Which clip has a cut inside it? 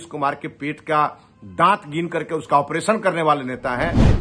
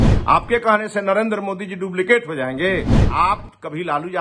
second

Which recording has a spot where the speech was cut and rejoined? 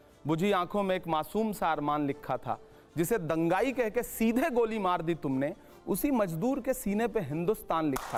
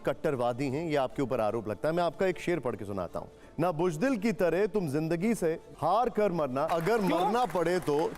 second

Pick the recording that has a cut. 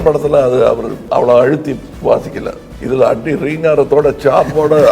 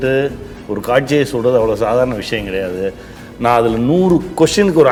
first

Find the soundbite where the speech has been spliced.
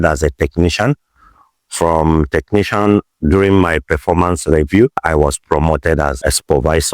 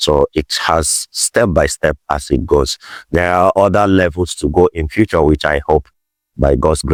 first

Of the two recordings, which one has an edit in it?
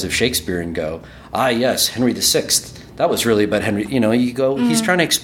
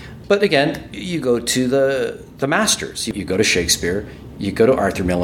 second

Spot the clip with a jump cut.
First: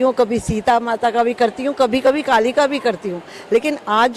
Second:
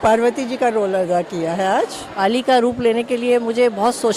second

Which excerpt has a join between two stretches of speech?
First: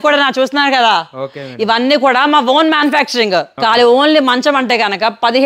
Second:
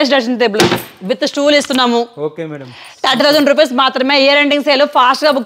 first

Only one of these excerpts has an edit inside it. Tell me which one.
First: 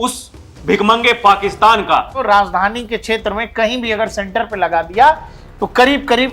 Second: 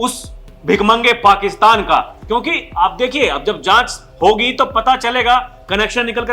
first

